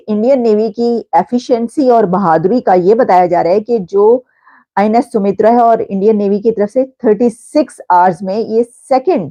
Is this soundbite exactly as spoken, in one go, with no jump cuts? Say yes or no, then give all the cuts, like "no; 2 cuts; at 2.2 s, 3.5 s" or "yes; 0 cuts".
yes; 0 cuts